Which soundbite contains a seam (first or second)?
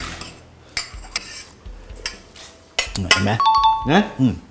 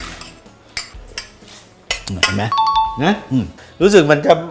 second